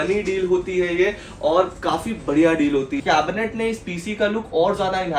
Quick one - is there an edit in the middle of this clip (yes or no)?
yes